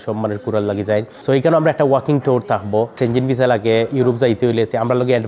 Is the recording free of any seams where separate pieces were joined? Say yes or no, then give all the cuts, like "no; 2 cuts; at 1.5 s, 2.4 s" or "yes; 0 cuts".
no; 2 cuts; at 1.1 s, 2.9 s